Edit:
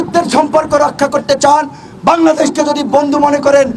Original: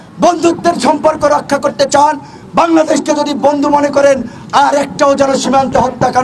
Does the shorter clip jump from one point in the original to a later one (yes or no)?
no